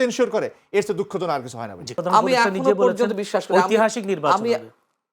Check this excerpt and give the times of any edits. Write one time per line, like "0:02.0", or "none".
0:01.9